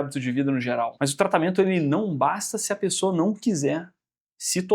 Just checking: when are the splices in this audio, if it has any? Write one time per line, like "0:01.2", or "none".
0:00.9